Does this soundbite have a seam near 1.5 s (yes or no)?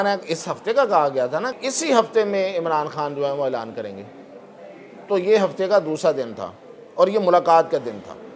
yes